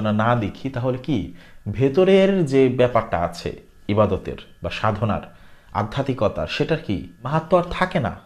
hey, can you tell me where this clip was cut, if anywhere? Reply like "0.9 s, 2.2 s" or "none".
7.1 s

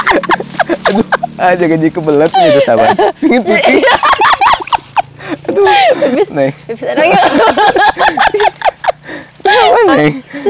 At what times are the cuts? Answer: none

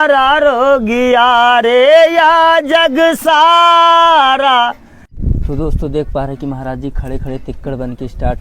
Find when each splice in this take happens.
5.1 s

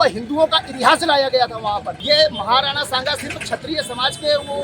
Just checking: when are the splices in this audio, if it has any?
1.9 s

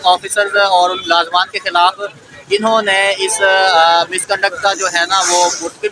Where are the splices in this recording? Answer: none

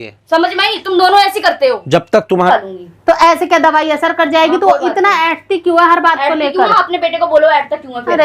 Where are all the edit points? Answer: 2.4 s

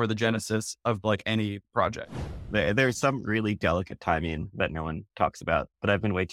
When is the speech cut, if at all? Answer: 2.1 s

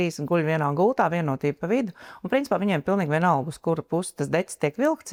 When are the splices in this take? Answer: none

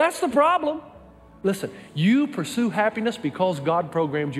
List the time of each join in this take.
1.2 s

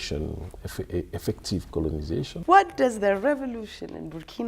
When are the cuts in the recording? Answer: 2.3 s

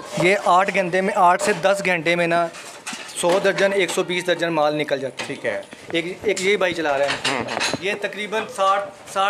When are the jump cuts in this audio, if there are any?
5.8 s, 7.8 s

